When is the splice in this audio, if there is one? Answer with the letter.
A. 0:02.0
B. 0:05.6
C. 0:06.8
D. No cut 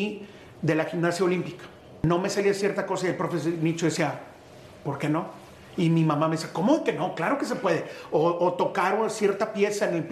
A